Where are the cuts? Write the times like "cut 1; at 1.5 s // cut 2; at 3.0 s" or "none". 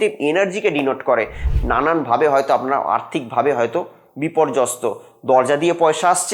cut 1; at 1.5 s